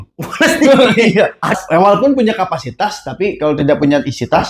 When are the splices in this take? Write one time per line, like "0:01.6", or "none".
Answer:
0:01.5

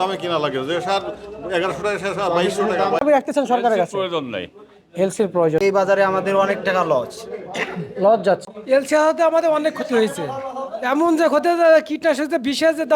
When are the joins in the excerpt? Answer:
0:03.0
0:05.6
0:08.5

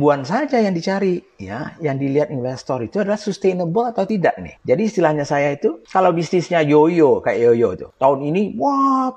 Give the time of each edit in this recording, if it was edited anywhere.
0:04.1
0:05.8
0:07.8

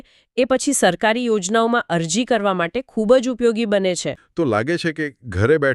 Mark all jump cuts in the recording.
0:04.2

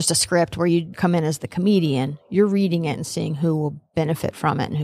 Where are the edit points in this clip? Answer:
0:01.0

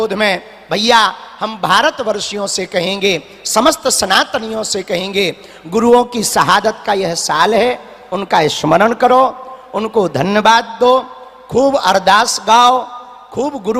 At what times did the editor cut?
none

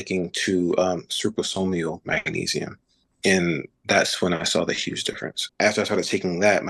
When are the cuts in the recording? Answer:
0:05.4

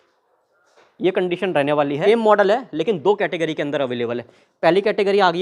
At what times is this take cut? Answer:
0:02.0

